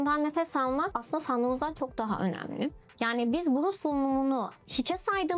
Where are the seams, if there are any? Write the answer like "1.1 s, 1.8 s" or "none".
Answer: 2.9 s